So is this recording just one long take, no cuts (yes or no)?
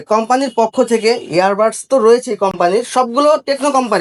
yes